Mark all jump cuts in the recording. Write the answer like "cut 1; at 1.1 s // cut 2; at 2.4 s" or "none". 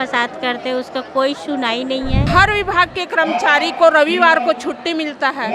cut 1; at 2.3 s